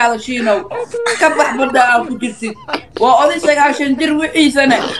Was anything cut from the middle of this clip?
no; 0 cuts

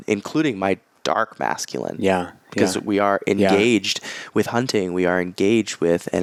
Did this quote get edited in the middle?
no; 0 cuts

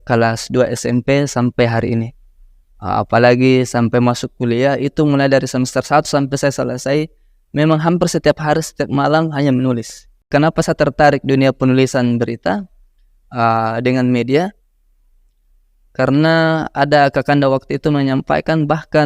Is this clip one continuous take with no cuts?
no; 1 cut; at 10.2 s

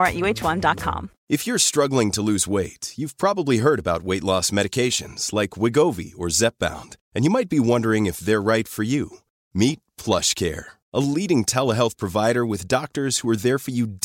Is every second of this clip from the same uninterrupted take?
no; 1 cut; at 1.1 s

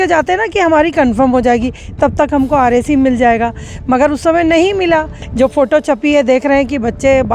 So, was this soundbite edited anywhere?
yes; 1 cut; at 5.2 s

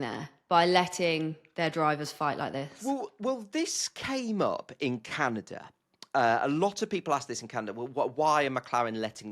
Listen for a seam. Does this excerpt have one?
no; 0 cuts

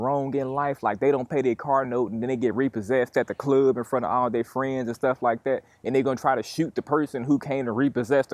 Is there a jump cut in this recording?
no; 0 cuts

